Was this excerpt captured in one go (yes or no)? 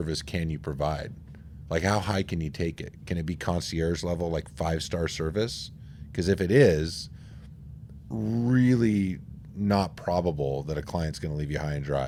yes